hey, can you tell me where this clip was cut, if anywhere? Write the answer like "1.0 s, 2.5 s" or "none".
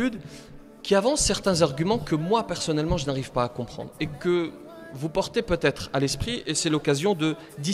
none